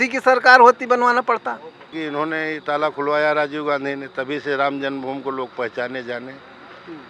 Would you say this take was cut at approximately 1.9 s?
yes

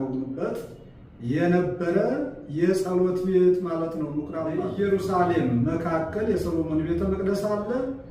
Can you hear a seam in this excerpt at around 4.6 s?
yes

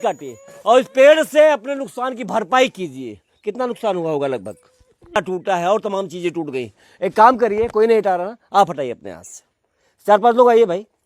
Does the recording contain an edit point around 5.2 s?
yes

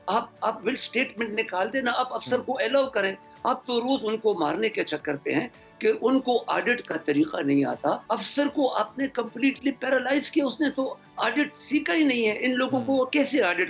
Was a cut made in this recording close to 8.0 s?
yes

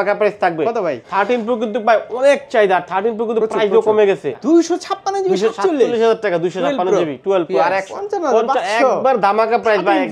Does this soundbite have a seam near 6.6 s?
no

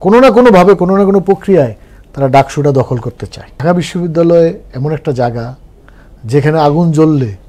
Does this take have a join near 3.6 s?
yes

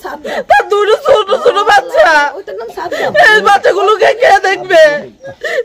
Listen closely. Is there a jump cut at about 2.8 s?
no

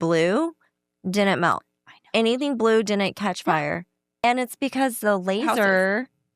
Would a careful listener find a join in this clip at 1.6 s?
no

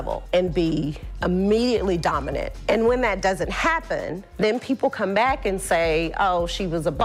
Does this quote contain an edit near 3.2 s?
no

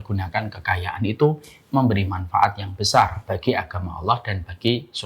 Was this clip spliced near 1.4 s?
no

